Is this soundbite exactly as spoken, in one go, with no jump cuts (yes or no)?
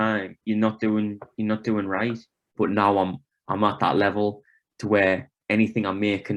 no